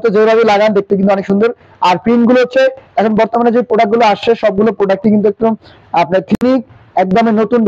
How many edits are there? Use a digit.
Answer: 1